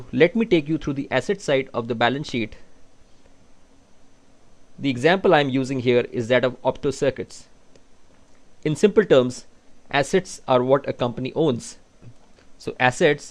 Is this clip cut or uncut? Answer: cut